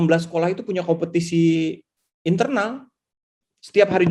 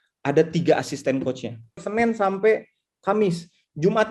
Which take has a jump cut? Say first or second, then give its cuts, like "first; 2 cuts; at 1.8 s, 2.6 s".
second; 1 cut; at 1.8 s